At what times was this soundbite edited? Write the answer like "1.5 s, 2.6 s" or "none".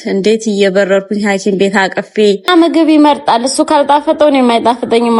2.5 s